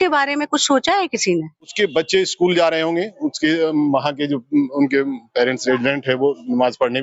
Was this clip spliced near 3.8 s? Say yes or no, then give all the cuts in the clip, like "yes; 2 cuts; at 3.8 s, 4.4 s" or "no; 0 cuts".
no; 1 cut; at 1.7 s